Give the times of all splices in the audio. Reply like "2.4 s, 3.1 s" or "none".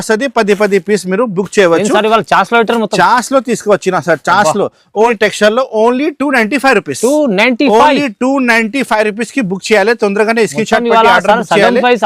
5.1 s